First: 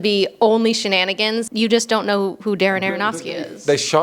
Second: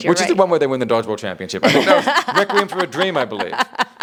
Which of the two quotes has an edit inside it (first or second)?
first